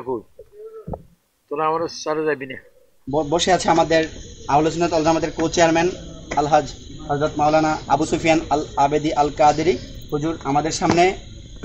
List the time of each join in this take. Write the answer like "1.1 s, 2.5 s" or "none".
3.0 s